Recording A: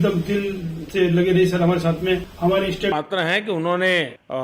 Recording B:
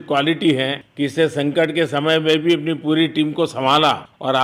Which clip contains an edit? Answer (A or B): A